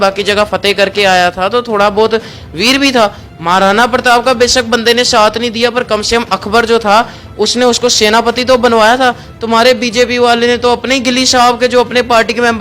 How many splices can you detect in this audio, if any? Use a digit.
0